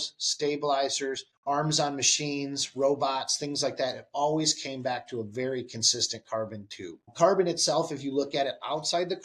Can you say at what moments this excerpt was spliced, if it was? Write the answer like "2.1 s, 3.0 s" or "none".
1.3 s, 7.1 s

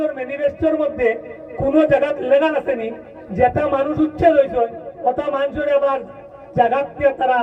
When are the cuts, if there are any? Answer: none

